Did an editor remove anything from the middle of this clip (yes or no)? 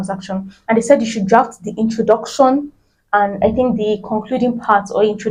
no